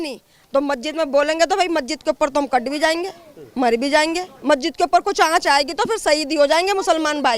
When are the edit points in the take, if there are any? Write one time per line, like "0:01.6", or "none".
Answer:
0:04.3